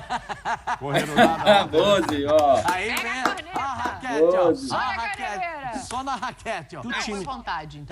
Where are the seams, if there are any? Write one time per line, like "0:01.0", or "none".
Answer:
0:06.8